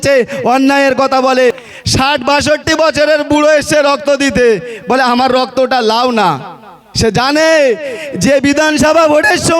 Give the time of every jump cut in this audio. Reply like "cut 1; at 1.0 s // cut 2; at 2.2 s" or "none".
cut 1; at 1.6 s